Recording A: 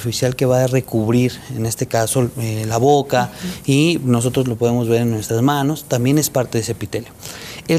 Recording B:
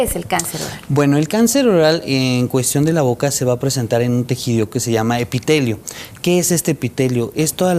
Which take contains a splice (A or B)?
B